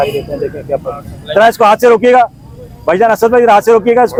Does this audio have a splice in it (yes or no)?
no